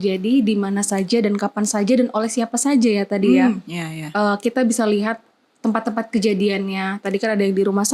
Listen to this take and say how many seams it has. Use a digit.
0